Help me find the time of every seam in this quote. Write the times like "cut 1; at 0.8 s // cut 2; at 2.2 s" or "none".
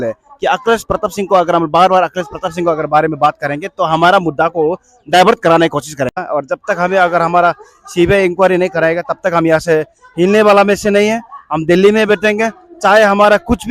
cut 1; at 6.2 s